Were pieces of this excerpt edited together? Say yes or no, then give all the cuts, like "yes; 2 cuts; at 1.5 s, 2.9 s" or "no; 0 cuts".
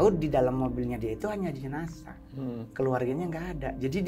no; 0 cuts